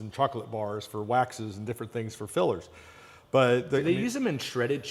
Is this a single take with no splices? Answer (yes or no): yes